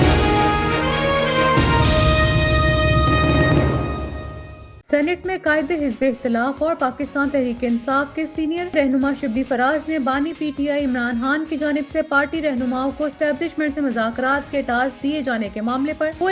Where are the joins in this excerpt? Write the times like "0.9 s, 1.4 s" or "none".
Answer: none